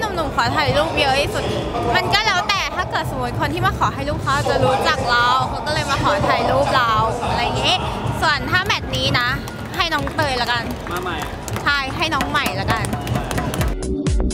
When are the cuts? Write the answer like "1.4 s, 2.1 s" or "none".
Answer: none